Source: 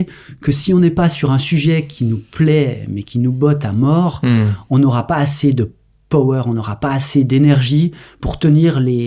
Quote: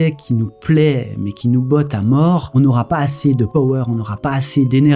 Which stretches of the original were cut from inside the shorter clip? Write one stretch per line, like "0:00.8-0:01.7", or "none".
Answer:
0:04.2-0:04.6
0:05.7-0:06.1

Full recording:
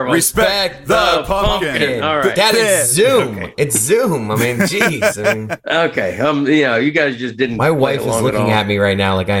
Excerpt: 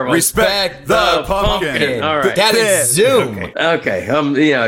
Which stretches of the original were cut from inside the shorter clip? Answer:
0:03.4-0:05.5

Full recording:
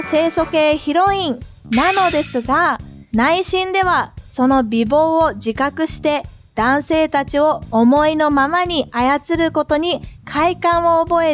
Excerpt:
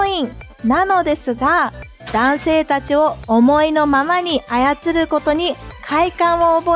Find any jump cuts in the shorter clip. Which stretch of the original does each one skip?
0:03.0-0:06.3

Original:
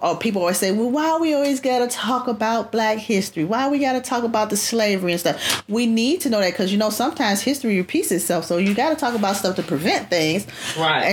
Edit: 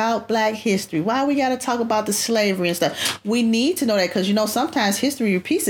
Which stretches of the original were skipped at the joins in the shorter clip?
none

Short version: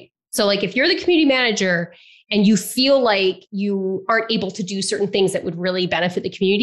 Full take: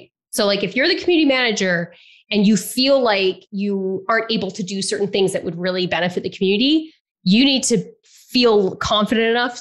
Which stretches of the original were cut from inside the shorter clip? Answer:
none

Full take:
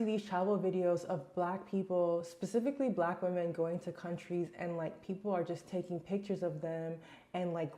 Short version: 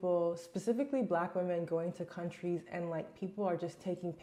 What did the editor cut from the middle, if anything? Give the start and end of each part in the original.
none

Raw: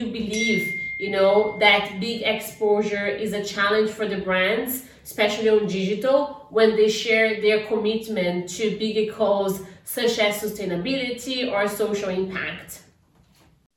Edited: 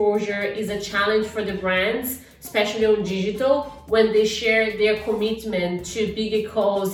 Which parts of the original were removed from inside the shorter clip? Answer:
none

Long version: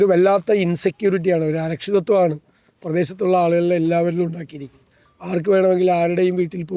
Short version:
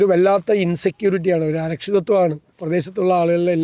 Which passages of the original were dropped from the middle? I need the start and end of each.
0:02.5-0:02.7

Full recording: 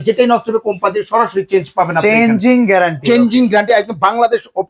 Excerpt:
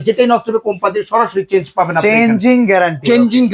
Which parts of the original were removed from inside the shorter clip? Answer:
none

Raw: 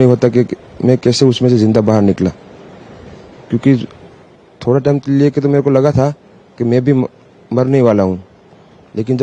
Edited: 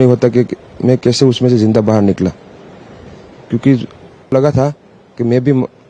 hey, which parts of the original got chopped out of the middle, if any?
0:04.3-0:05.7

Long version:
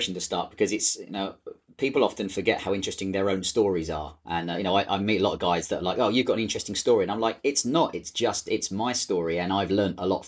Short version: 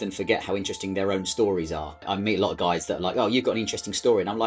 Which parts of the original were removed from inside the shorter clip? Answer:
0:04.2-0:04.9

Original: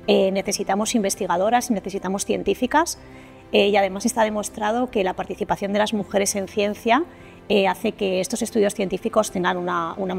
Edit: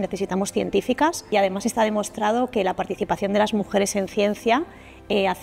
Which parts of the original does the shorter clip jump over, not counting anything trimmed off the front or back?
0:03.1-0:03.7

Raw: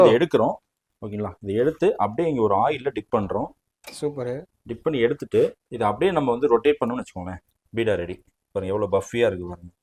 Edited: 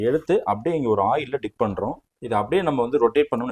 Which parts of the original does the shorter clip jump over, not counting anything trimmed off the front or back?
0:03.7-0:05.6

